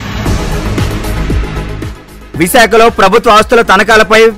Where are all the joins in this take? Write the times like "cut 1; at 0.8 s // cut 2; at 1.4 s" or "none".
cut 1; at 1.6 s